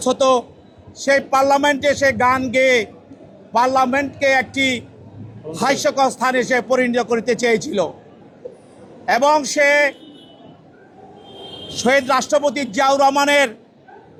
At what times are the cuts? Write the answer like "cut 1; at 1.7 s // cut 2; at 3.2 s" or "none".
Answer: none